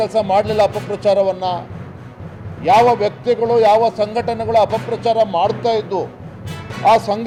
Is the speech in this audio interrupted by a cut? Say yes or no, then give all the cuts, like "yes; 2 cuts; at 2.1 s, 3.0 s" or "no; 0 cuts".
no; 0 cuts